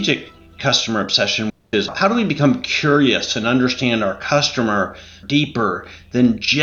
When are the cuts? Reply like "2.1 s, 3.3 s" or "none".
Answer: 1.5 s, 5.2 s